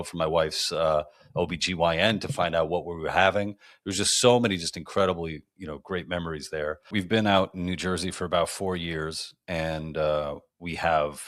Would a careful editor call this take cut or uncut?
cut